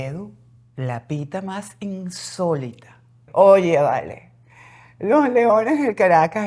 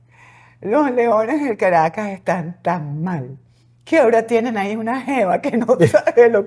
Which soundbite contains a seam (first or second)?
first